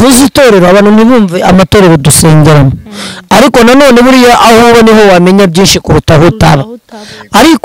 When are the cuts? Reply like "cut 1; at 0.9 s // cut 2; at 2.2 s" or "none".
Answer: none